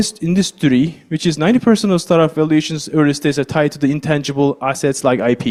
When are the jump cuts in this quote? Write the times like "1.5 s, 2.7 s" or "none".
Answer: none